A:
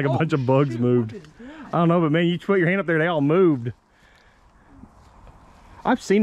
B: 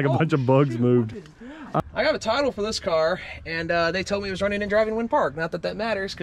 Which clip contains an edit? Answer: B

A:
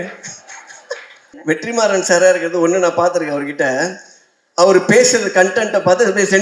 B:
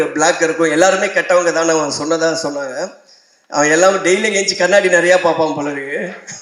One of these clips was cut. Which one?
A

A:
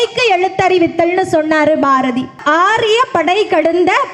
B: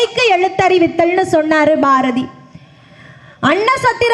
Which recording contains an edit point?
A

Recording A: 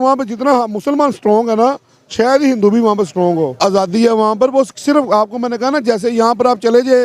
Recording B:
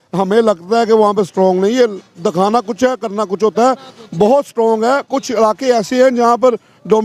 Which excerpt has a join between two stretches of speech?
A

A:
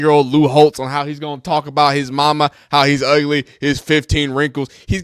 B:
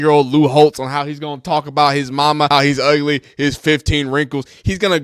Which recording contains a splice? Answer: B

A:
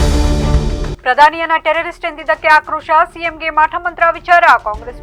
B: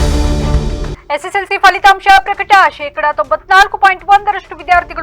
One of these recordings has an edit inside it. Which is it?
B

